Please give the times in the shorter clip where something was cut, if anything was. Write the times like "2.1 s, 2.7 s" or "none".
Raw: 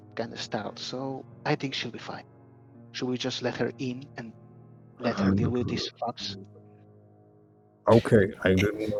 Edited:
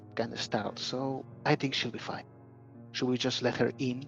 none